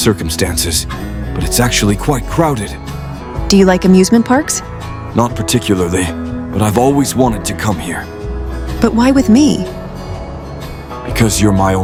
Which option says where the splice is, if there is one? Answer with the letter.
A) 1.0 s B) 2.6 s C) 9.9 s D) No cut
D